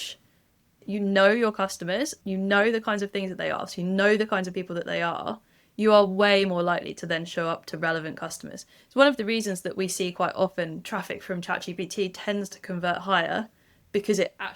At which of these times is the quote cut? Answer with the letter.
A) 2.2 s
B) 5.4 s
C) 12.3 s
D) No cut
A